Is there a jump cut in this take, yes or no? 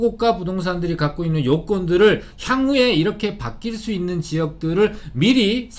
no